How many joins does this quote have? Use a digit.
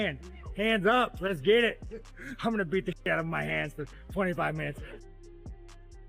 1